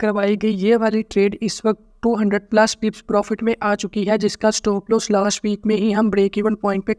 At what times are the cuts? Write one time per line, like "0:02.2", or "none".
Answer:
none